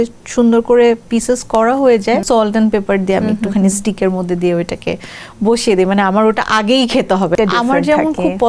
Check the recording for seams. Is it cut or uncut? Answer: cut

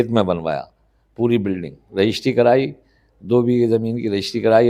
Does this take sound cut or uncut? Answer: uncut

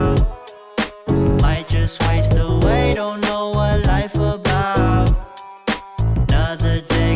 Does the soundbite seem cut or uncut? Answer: uncut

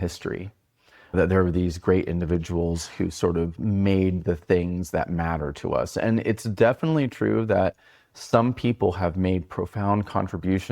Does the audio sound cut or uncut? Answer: cut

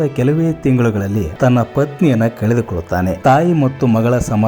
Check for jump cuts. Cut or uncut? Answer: cut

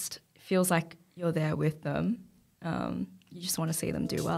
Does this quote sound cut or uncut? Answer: uncut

